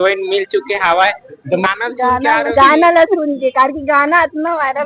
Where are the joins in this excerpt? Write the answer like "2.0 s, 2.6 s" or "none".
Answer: 1.7 s